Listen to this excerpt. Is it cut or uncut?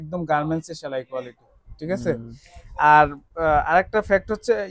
uncut